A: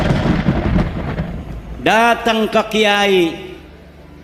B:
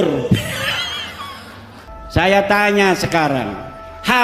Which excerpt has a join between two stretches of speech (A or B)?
B